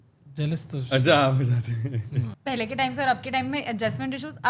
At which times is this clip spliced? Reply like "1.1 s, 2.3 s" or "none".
2.3 s